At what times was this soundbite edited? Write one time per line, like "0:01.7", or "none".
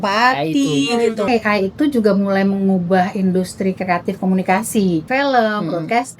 0:01.3
0:05.0